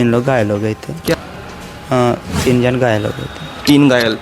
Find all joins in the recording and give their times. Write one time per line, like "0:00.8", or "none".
0:01.1

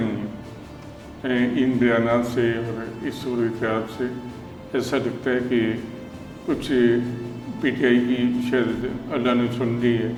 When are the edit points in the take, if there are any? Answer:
none

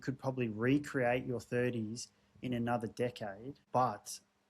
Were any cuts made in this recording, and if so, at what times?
0:03.5

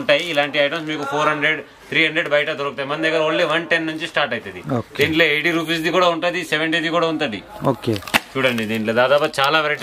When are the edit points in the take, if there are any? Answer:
none

